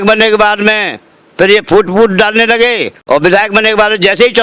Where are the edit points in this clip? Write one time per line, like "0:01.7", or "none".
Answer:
0:02.9